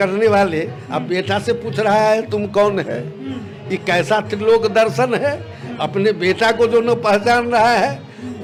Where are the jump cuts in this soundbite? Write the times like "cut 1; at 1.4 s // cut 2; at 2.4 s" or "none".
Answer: none